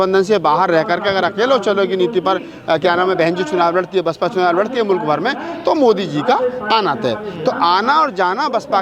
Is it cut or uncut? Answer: uncut